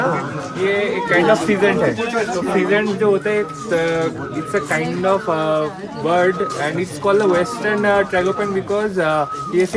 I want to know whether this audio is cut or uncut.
uncut